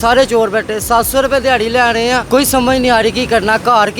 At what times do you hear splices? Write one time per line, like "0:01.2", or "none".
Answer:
0:02.2